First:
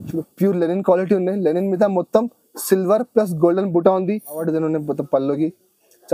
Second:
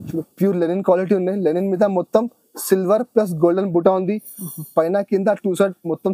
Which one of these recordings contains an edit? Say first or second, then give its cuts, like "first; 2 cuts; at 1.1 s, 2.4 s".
first; 1 cut; at 4.4 s